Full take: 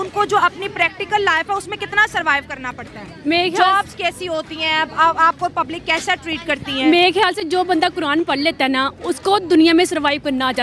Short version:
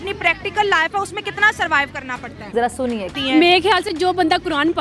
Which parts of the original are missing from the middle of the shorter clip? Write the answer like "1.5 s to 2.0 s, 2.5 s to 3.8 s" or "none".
3.2 s to 6.2 s